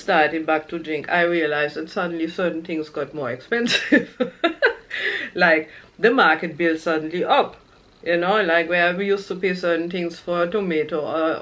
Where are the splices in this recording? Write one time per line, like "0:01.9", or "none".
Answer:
none